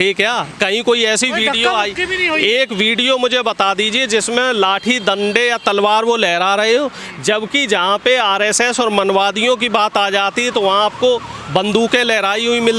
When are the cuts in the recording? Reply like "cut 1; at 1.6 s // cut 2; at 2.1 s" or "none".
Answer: none